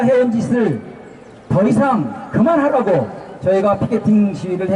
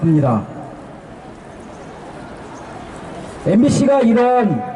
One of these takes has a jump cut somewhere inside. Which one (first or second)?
first